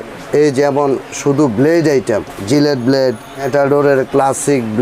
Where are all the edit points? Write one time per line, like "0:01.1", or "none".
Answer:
0:03.5